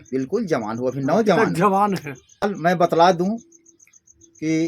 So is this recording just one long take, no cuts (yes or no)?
no